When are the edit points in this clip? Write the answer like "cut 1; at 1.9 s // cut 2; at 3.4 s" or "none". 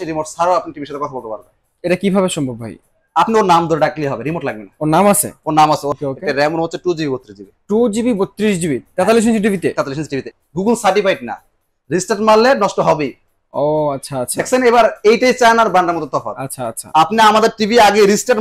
cut 1; at 5.9 s // cut 2; at 10.3 s

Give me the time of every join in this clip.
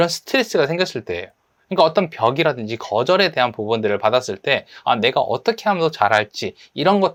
none

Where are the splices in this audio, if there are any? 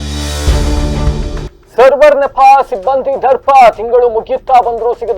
cut 1; at 1.5 s

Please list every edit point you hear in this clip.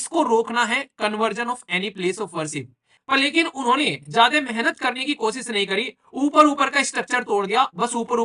cut 1; at 2.9 s

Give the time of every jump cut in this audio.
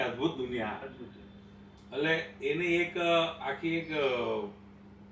none

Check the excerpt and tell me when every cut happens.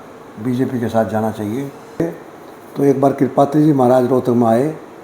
cut 1; at 2.0 s

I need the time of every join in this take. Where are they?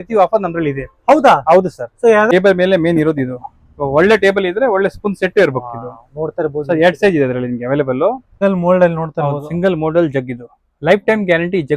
cut 1; at 2.3 s // cut 2; at 8.3 s

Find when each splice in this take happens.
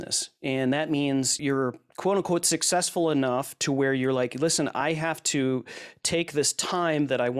cut 1; at 1.4 s

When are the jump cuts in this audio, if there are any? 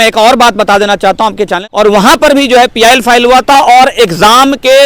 cut 1; at 1.6 s

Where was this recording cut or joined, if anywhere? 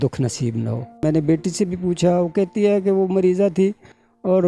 cut 1; at 1.0 s

